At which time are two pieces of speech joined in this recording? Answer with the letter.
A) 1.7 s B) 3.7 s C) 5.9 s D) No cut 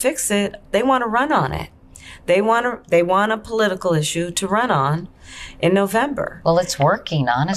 D